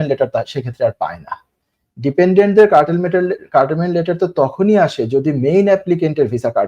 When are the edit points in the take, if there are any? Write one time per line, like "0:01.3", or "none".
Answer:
none